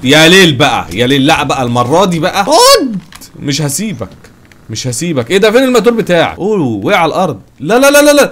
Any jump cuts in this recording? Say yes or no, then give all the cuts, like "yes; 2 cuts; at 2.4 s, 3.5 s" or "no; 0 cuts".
yes; 2 cuts; at 2.5 s, 6.3 s